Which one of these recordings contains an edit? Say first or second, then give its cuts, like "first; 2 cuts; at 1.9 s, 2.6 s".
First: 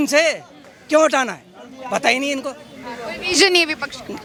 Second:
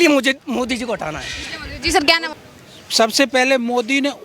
second; 1 cut; at 2.3 s